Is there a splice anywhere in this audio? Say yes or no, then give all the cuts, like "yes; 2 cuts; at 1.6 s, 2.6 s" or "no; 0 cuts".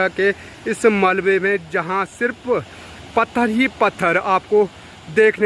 no; 0 cuts